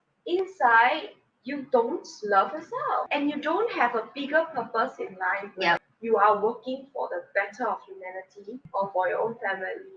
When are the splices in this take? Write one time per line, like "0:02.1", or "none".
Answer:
0:03.1
0:05.9
0:08.6